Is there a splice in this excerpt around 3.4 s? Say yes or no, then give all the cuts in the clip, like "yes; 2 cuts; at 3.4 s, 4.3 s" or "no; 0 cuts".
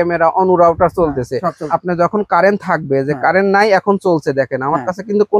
no; 1 cut; at 1.7 s